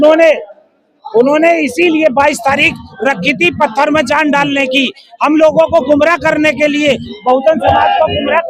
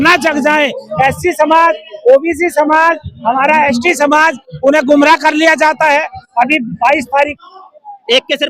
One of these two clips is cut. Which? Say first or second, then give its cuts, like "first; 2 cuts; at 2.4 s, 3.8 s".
second; 1 cut; at 7.3 s